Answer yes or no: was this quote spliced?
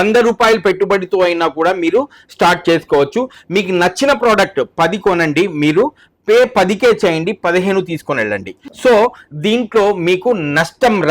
no